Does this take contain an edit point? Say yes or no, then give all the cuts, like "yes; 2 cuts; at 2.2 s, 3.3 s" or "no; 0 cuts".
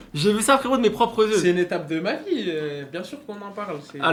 no; 0 cuts